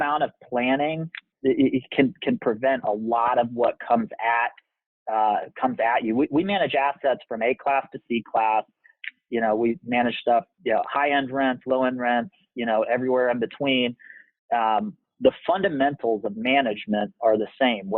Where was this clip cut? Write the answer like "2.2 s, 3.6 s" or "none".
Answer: 1.3 s